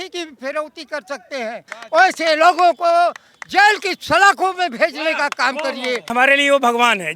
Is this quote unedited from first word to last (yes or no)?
no